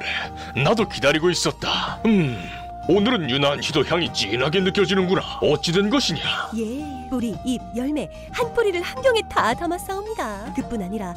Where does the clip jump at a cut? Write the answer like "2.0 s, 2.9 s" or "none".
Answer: none

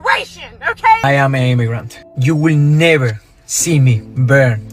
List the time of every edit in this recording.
1.0 s

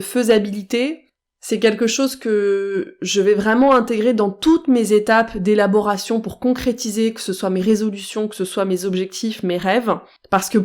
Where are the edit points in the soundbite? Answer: none

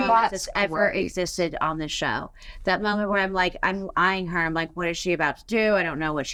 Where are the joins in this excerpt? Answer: none

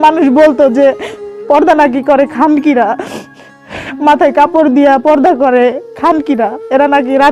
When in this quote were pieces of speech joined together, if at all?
none

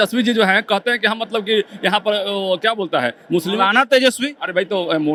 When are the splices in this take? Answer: none

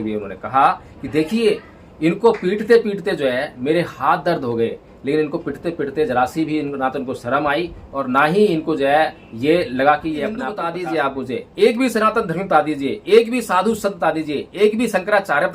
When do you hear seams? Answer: 10.6 s

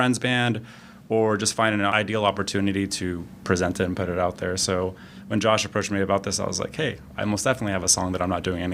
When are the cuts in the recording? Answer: 1.9 s

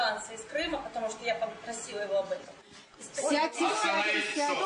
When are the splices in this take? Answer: none

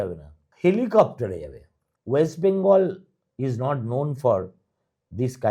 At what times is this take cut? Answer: none

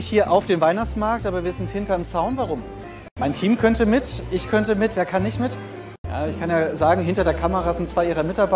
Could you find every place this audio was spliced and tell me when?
3.0 s, 6.0 s

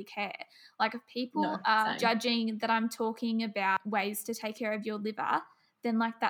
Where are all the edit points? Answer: 2.0 s, 3.8 s

